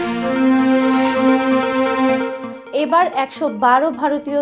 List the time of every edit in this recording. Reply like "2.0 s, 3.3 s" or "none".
none